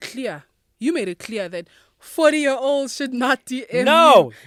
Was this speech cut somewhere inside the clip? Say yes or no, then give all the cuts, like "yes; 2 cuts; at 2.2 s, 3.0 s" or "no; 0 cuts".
no; 0 cuts